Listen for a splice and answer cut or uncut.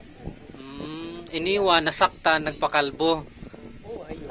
uncut